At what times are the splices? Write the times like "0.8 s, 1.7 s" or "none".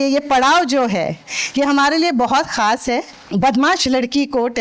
3.2 s

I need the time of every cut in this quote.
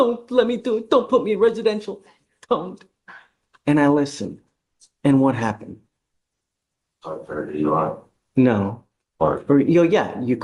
none

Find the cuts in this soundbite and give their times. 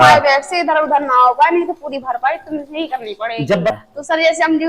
3.7 s

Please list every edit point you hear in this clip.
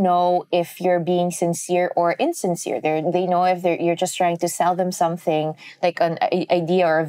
none

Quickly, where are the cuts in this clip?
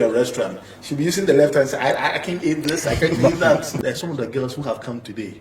3.7 s

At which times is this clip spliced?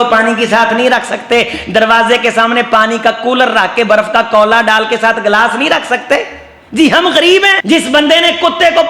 7.6 s

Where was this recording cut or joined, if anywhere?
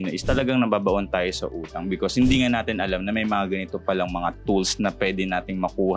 none

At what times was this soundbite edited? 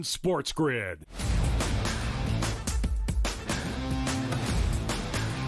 1.1 s, 2.1 s

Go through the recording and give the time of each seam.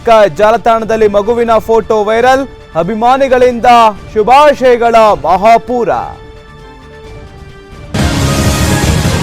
7.9 s

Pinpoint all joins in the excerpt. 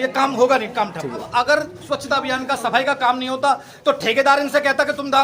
1.2 s

